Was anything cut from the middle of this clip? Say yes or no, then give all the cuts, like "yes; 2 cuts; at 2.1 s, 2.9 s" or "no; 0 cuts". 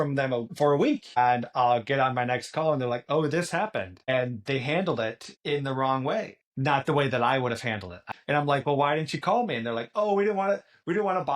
yes; 1 cut; at 8.1 s